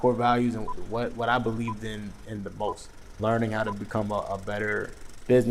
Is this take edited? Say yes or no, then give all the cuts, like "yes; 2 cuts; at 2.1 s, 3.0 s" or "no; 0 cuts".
yes; 1 cut; at 3.1 s